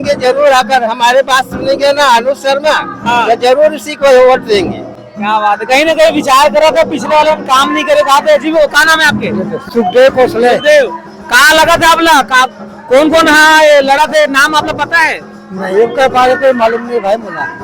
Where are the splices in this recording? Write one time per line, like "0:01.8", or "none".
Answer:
none

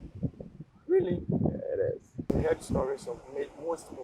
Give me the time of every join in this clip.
0:02.3

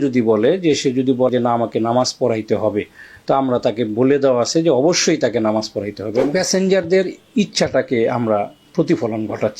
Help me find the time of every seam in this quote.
0:01.3
0:06.3

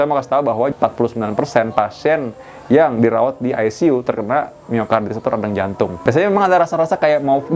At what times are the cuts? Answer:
0:01.0
0:06.0

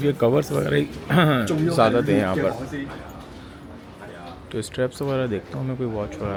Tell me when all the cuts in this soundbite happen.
none

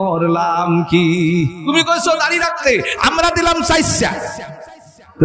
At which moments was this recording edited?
0:01.7

